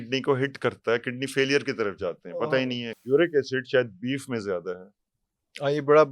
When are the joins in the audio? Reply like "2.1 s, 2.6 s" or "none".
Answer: 2.9 s

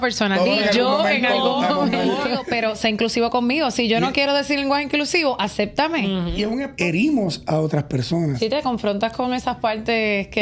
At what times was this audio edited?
2.5 s, 6.7 s

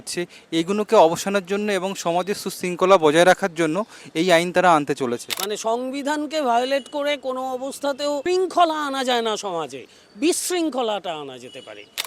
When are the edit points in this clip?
5.4 s, 8.2 s

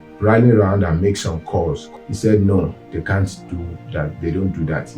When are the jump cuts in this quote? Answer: 1.9 s

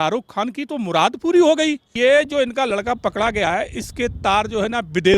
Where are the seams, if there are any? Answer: 1.9 s

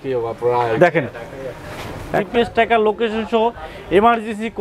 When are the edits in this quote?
2.1 s

